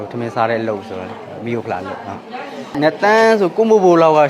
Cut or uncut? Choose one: cut